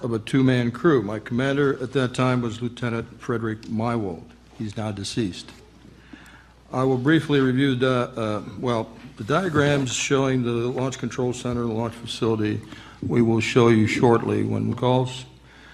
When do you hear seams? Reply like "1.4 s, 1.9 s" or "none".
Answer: none